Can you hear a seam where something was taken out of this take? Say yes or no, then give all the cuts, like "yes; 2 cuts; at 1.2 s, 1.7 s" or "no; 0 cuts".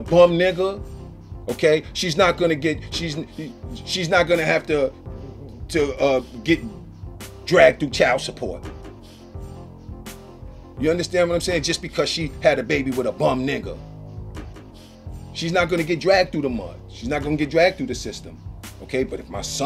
no; 0 cuts